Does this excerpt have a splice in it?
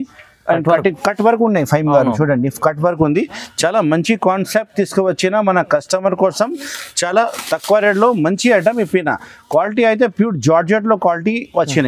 no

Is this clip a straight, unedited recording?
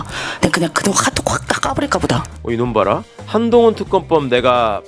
no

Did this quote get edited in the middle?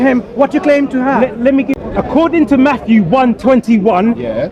yes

